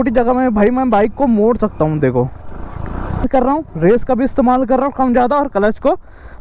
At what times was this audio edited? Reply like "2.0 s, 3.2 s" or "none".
3.3 s

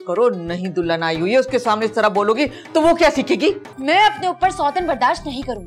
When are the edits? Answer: 3.7 s

